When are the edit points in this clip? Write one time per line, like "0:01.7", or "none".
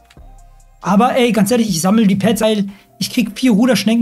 0:02.4

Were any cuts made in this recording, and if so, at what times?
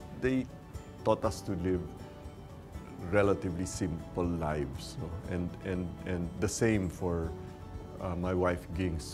none

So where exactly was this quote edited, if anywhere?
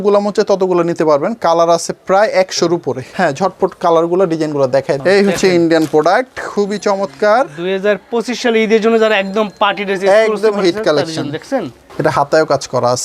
0:03.0
0:05.0
0:11.8

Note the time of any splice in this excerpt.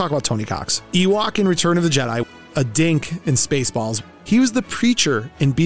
0:02.2
0:04.0

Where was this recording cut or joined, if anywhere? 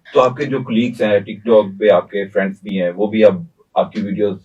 none

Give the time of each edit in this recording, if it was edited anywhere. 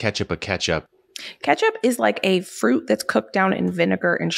0:00.9

